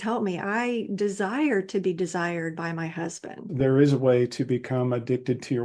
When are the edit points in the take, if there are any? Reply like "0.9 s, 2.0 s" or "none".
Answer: 3.4 s